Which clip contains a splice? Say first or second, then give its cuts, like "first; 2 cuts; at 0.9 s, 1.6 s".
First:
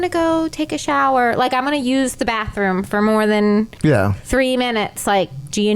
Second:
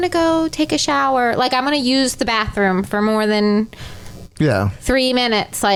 first; 1 cut; at 3.7 s